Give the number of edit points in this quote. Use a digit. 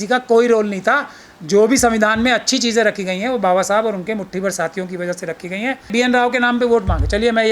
1